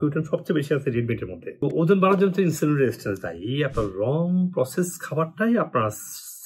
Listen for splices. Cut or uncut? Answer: cut